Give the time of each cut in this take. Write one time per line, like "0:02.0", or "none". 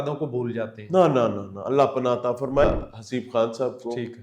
0:02.6